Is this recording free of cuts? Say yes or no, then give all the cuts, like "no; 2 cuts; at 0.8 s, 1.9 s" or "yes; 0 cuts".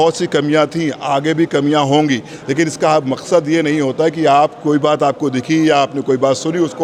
yes; 0 cuts